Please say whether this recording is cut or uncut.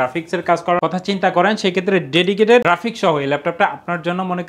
uncut